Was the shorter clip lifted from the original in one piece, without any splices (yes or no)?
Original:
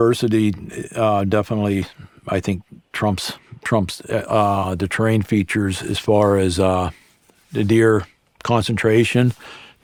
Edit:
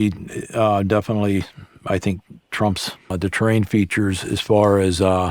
no